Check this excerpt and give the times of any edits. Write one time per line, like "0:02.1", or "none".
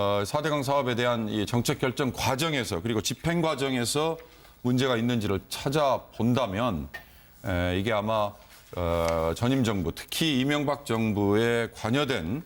none

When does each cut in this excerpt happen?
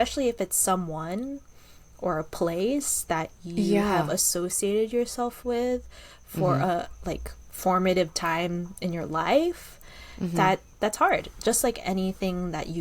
none

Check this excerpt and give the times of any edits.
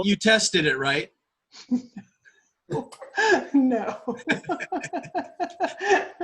none

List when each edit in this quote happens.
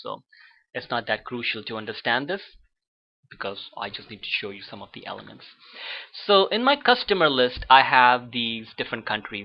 0:04.7

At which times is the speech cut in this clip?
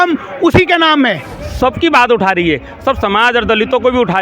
0:01.5

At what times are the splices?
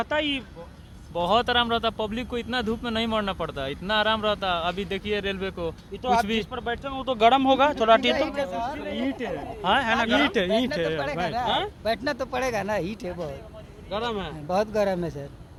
none

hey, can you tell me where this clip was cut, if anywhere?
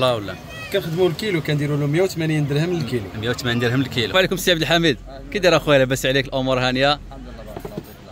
0:04.1

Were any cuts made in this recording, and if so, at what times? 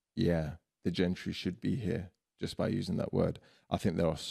none

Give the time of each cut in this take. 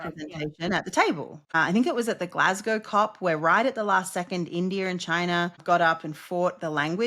0:01.4
0:05.6

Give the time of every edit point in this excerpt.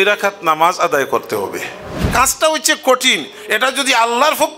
0:02.1

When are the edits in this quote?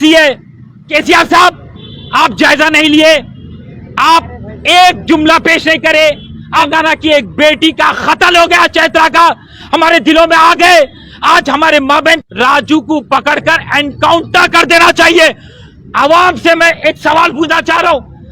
0:00.9
0:06.7
0:12.2

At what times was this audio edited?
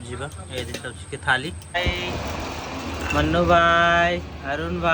0:01.8

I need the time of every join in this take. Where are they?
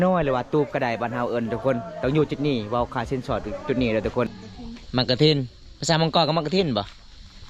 0:04.4

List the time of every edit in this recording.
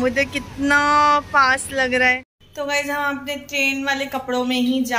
0:02.4

